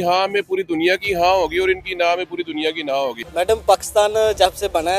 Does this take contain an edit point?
yes; 1 cut; at 3.2 s

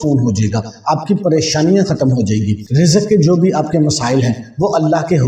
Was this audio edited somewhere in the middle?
yes; 1 cut; at 2.6 s

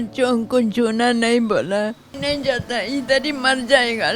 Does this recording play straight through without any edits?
no; 1 cut; at 2.1 s

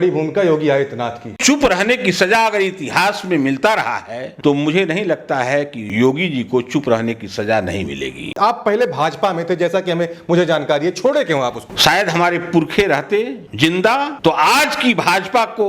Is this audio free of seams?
no; 4 cuts; at 1.4 s, 5.8 s, 8.3 s, 11.6 s

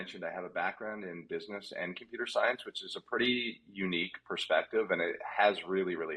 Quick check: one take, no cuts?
yes; 0 cuts

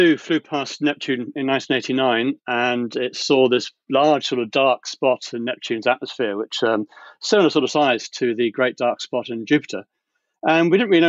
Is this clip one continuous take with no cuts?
yes; 0 cuts

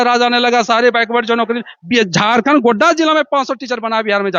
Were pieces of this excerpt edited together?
no; 0 cuts

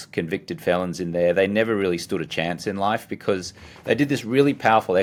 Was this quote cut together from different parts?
no; 0 cuts

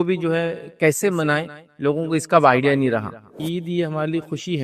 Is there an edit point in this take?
yes; 1 cut; at 3.4 s

